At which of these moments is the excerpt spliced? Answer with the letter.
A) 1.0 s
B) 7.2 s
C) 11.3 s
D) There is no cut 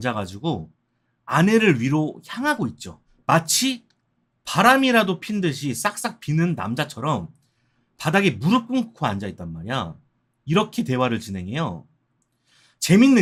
D